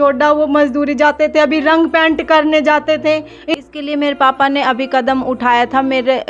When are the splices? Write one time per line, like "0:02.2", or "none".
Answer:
0:03.5